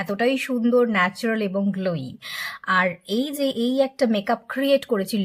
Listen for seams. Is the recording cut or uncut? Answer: uncut